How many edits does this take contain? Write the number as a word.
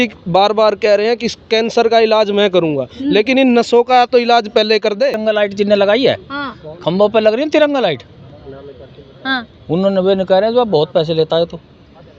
one